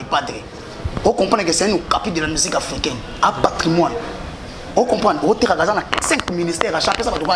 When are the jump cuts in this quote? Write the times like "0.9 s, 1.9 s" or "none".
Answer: none